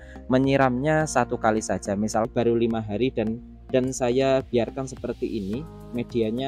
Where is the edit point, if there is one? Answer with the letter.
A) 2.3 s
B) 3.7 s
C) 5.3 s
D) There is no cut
A